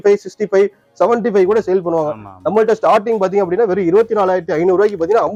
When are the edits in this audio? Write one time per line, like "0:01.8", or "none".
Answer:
none